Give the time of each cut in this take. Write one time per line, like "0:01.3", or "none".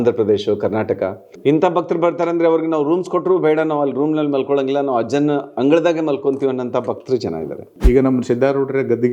0:01.2
0:07.7